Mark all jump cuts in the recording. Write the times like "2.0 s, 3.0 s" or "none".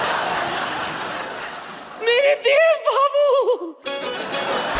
none